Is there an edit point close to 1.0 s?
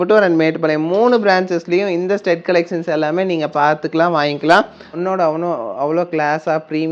no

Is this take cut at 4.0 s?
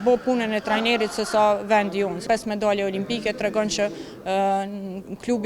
no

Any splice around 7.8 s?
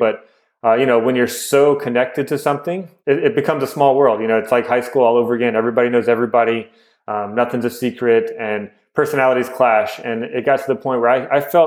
no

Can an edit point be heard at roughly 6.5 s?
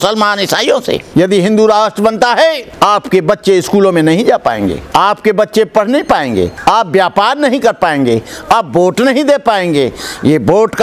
yes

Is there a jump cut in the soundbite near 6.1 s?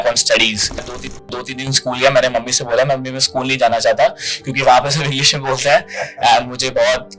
no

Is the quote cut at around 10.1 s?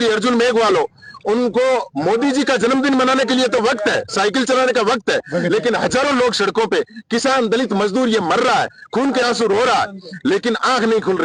no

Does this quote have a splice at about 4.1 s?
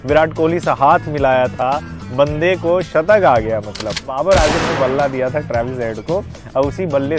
yes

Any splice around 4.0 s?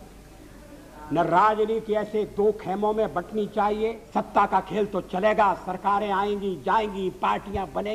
yes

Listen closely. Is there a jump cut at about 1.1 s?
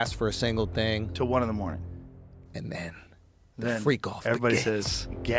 no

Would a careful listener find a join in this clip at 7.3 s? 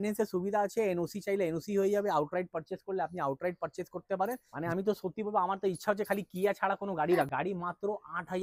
yes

